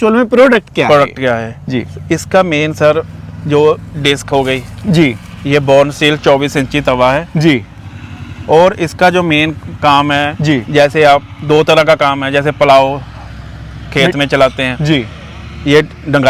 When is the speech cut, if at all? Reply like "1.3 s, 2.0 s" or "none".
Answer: none